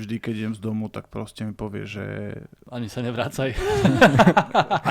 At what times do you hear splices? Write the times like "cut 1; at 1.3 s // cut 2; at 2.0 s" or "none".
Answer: cut 1; at 2.5 s